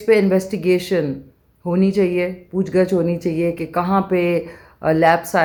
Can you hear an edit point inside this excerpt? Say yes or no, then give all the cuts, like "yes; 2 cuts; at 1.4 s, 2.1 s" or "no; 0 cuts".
no; 0 cuts